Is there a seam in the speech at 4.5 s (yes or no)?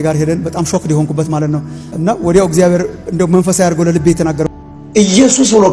yes